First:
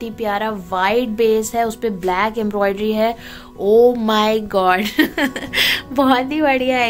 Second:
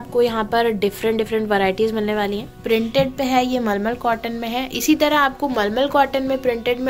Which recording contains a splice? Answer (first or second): second